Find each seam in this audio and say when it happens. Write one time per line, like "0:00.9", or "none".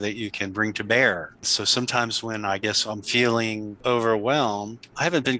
0:01.4

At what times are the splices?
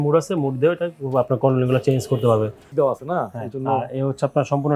0:02.7

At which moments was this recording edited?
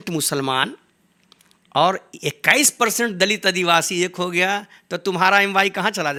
none

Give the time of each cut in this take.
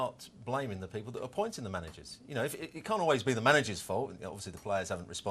none

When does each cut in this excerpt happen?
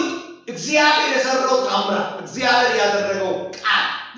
none

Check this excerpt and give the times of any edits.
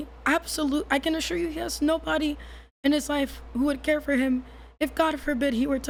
none

